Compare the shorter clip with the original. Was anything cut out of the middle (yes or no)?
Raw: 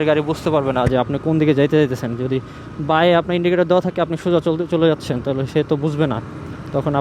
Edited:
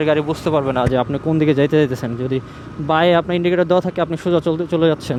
no